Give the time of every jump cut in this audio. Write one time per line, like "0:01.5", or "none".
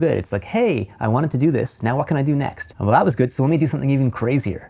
0:02.6